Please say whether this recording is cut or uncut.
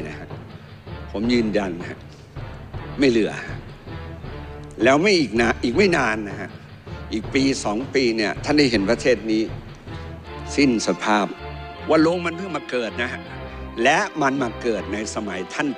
cut